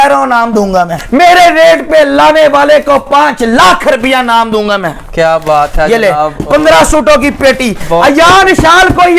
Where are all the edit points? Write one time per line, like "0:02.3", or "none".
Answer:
0:01.0